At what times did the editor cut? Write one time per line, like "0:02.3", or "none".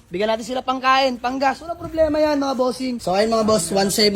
0:02.9